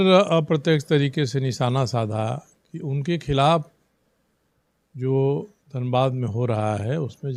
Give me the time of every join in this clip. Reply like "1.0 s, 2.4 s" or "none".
none